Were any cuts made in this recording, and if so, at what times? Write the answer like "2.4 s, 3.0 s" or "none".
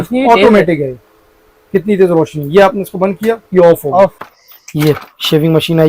4.2 s